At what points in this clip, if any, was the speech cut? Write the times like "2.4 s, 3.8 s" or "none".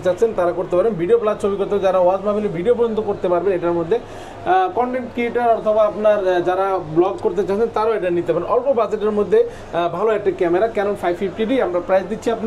none